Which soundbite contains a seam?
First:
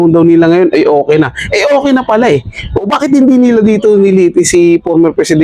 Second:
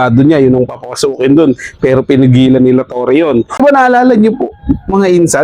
second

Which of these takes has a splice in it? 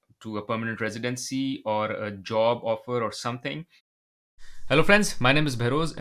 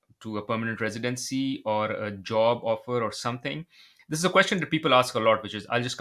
first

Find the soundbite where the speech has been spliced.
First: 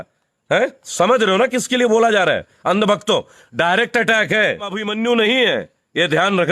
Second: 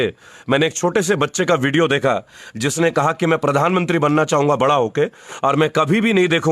first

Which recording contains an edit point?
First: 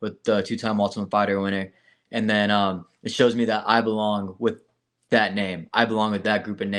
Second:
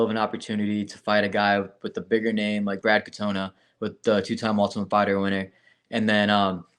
second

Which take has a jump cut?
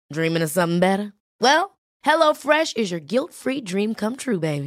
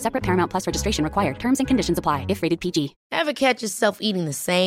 second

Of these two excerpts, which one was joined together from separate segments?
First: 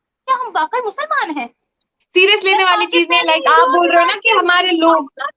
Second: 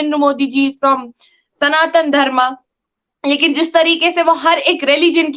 first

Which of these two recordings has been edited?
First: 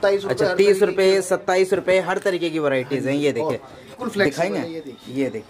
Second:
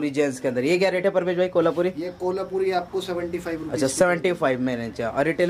first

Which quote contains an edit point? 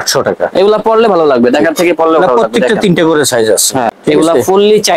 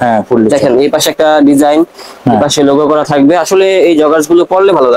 first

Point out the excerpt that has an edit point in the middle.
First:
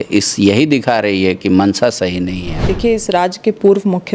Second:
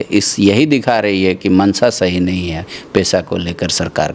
first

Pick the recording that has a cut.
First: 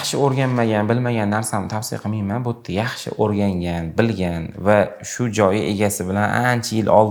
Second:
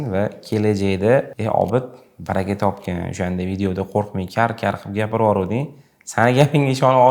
second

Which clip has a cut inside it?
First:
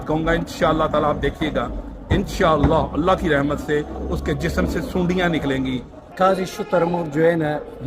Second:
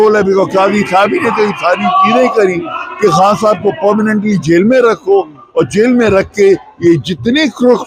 first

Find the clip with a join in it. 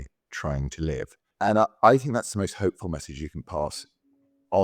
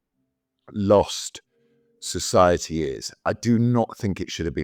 first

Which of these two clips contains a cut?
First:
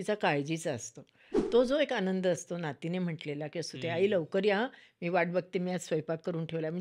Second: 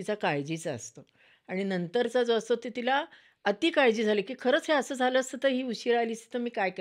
first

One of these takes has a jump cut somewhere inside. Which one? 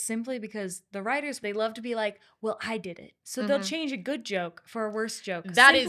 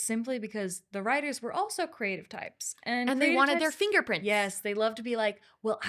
first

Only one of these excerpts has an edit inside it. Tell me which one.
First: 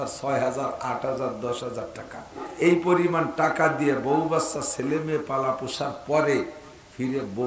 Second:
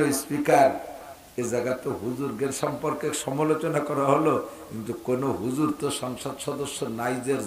first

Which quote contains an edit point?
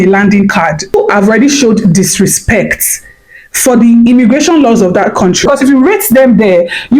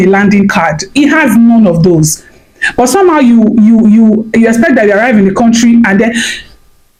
first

